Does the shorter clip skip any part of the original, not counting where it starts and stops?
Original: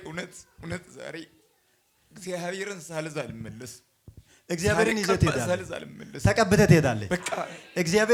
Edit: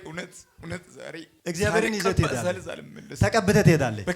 yes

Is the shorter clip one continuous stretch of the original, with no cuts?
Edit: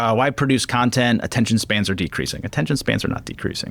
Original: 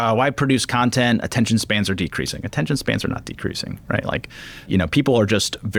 yes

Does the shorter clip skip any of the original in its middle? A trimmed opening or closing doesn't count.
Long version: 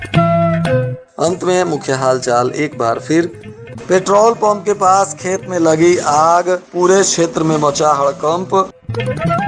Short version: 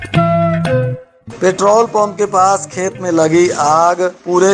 yes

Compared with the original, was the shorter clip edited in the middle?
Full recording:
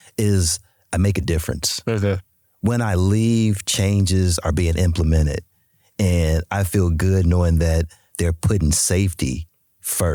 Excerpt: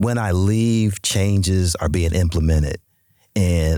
no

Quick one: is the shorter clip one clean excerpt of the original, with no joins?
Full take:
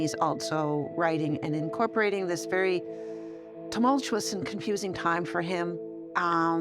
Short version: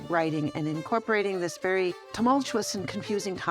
no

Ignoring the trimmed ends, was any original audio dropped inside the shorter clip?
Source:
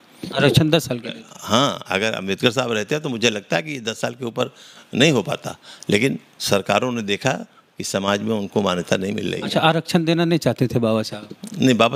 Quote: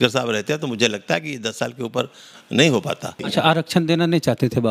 yes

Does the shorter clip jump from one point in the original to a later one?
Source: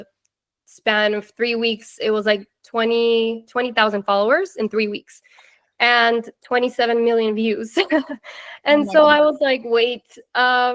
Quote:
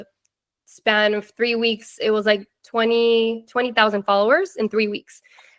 no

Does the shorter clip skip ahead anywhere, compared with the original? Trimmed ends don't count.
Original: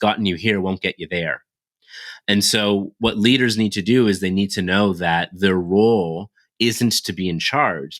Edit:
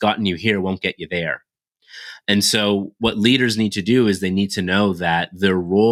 no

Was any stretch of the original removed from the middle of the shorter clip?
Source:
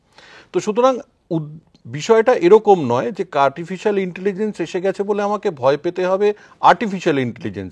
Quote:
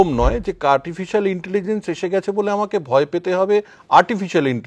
no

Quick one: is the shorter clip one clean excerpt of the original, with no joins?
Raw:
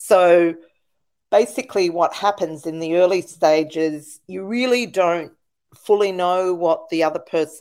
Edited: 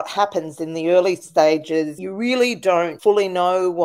no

